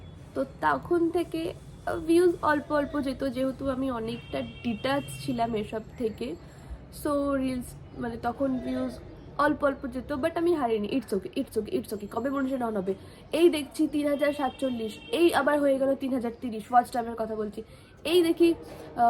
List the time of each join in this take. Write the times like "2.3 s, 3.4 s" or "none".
none